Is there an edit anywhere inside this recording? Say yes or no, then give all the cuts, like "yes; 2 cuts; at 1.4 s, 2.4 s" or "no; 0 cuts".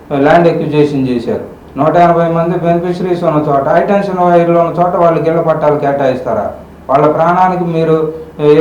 yes; 1 cut; at 1.6 s